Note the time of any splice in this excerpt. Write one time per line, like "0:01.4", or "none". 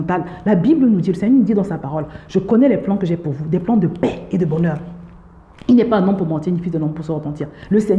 none